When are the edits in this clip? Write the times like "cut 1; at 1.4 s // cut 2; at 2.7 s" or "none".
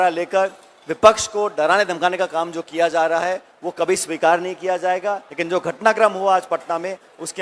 cut 1; at 5.3 s